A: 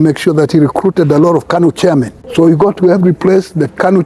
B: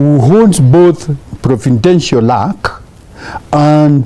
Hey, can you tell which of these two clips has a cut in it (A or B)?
A